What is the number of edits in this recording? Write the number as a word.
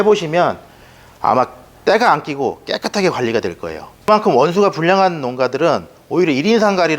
one